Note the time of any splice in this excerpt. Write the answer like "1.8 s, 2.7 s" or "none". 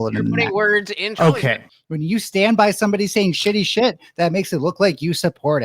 1.7 s